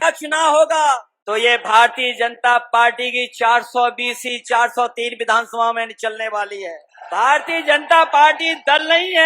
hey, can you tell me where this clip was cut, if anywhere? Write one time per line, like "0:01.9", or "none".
0:01.1
0:06.9